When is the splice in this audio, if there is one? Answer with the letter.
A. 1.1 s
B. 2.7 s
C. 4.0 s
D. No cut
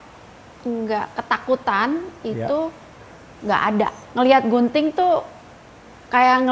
C